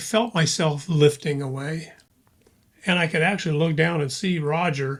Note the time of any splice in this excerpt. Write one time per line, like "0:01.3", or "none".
none